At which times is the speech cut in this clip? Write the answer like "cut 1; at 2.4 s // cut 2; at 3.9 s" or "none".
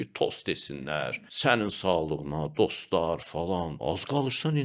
cut 1; at 1.1 s // cut 2; at 3.8 s